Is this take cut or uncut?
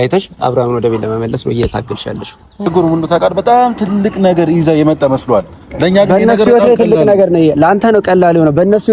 cut